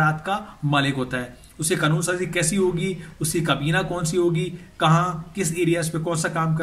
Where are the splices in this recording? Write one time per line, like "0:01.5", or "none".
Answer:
none